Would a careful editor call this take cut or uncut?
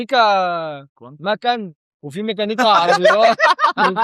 uncut